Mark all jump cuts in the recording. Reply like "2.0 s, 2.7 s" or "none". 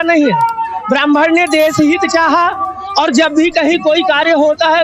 none